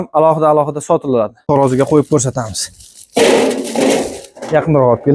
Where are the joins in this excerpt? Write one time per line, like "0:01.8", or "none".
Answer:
0:01.4